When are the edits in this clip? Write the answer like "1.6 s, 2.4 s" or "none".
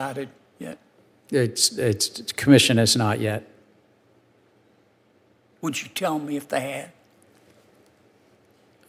none

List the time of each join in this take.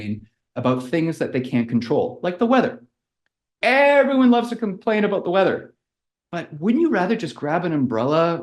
none

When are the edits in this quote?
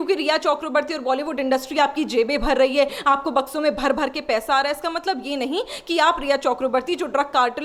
none

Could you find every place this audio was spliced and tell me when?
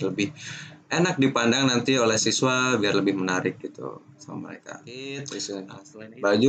4.9 s

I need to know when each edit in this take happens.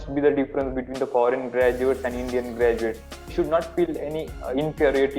none

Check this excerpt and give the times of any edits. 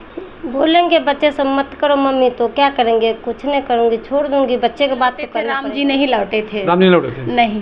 5.4 s

